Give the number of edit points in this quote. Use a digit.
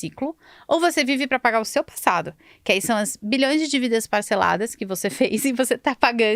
0